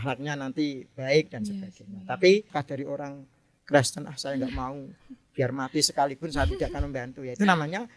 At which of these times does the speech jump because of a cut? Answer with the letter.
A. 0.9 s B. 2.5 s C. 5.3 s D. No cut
B